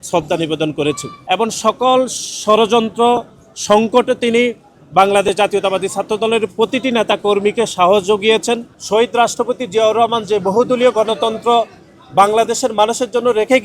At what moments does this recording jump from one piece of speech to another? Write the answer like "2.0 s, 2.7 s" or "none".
1.1 s, 8.7 s